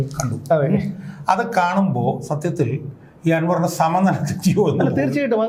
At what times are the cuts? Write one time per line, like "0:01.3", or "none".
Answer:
none